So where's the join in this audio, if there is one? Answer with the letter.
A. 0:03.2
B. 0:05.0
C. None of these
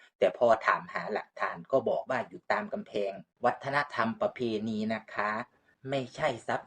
A